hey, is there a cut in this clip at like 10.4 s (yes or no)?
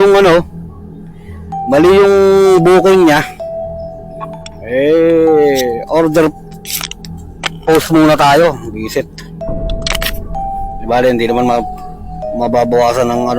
yes